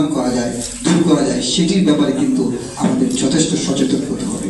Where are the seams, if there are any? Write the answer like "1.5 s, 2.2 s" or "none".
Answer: none